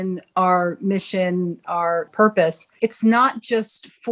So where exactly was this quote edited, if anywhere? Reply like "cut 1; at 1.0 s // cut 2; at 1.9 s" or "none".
cut 1; at 2.2 s